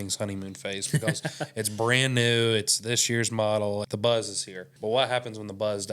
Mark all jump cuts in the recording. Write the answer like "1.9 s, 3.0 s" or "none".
3.8 s, 4.7 s

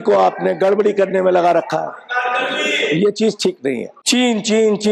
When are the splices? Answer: 3.9 s

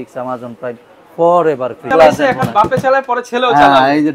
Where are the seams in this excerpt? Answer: 1.9 s

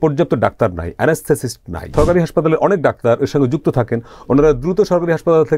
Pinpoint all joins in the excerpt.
1.9 s

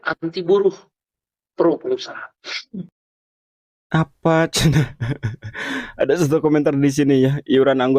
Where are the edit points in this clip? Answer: none

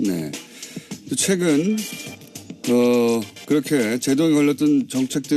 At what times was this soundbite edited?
none

